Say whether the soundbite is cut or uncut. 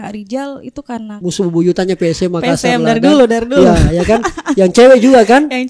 cut